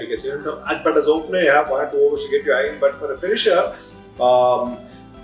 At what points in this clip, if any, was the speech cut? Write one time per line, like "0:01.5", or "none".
none

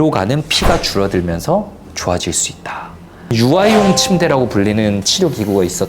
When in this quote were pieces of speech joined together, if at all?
0:03.3

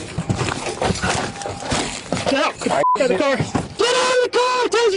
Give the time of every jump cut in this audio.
0:03.7

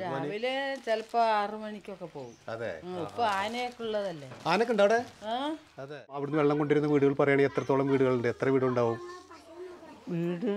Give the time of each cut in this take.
0:06.3

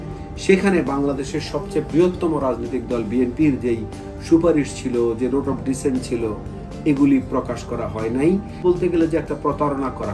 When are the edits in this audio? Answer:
0:08.6

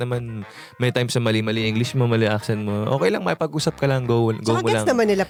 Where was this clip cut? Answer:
none

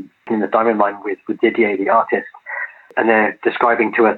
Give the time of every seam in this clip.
none

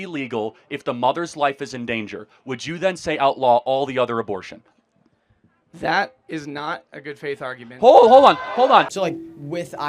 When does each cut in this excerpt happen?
0:08.9

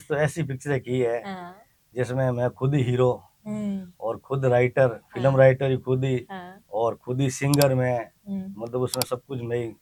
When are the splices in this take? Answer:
none

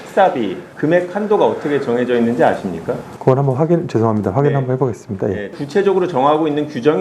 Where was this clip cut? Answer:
0:05.5

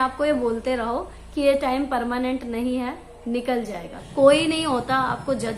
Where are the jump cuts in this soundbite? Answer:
0:03.9

